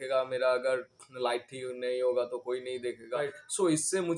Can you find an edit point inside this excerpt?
yes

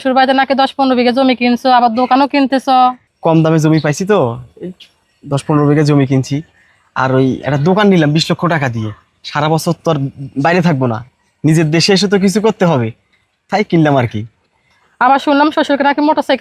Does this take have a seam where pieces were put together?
yes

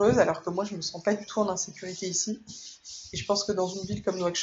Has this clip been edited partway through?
no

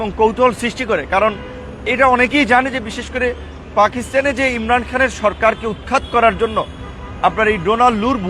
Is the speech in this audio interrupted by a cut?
no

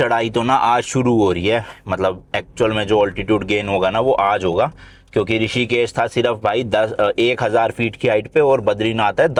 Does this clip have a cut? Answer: no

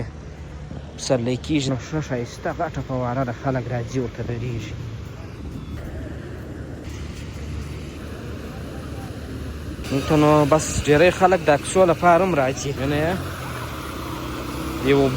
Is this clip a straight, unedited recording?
no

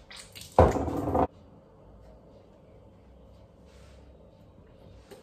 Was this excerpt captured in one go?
no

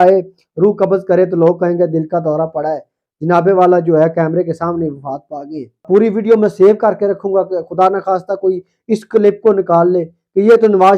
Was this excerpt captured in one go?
no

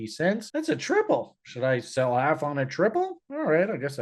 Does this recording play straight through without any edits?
yes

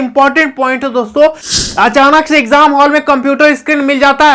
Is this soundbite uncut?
no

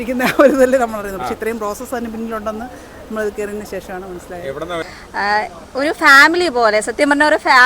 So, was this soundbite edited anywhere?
yes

